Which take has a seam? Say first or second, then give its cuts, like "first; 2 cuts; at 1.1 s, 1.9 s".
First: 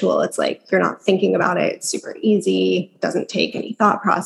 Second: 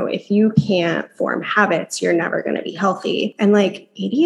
second; 1 cut; at 3.3 s